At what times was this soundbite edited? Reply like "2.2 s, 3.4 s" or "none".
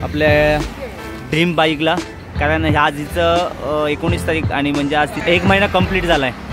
5.2 s